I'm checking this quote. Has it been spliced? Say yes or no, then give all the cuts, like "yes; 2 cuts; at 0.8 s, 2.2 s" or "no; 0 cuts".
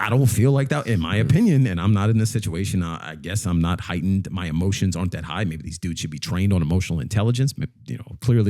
no; 0 cuts